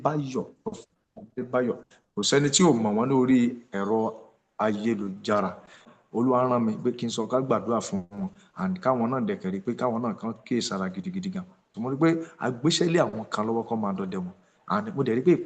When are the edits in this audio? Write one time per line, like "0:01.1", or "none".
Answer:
0:06.0
0:11.7